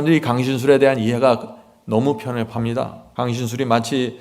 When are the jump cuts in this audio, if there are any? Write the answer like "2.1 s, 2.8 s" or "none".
3.0 s